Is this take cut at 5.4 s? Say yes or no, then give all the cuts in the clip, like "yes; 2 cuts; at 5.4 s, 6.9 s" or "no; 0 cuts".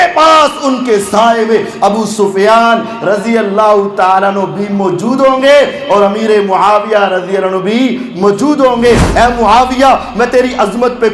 no; 1 cut; at 9.1 s